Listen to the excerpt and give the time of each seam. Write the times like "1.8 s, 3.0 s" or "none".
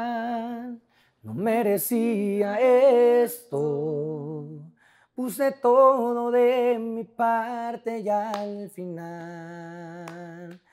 none